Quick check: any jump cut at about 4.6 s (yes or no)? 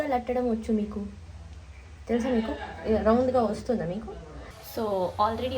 yes